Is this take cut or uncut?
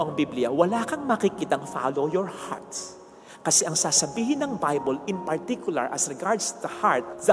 uncut